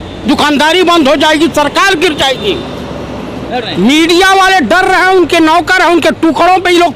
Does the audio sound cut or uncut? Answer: cut